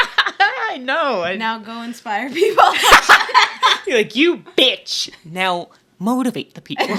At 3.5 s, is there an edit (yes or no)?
no